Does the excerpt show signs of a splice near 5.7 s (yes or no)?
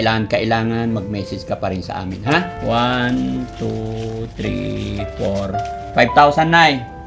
no